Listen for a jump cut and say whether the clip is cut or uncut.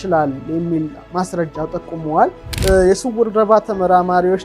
cut